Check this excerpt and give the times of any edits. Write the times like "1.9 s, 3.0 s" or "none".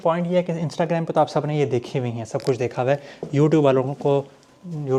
none